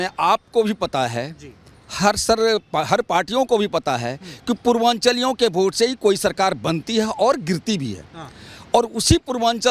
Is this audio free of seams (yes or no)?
yes